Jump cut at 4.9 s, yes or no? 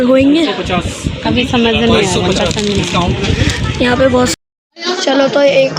no